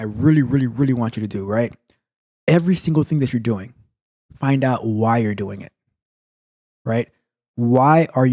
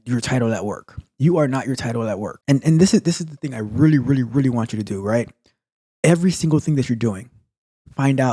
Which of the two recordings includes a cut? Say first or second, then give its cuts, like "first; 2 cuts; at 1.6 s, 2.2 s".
second; 1 cut; at 2.3 s